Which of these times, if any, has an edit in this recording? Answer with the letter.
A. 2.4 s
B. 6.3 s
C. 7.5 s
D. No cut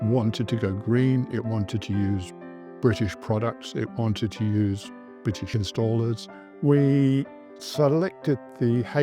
B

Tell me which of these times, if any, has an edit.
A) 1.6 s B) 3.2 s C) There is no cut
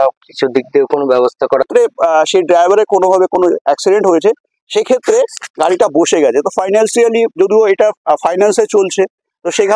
A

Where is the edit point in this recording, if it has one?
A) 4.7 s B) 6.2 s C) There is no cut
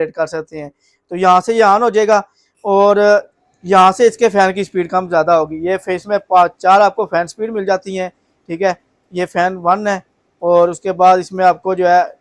C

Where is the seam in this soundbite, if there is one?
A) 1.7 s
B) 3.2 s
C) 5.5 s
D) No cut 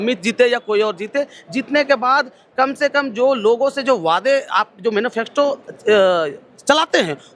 D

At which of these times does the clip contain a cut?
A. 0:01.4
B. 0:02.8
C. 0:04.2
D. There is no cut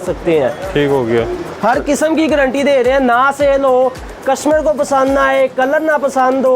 A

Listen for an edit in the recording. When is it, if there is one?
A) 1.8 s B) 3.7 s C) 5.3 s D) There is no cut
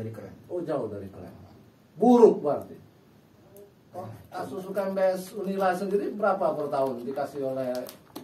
B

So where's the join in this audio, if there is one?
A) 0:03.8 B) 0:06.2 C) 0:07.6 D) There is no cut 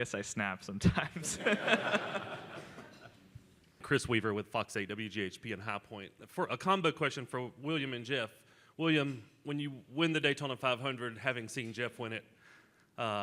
A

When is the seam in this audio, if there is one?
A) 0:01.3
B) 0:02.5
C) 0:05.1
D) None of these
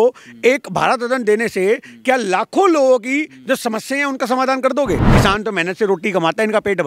C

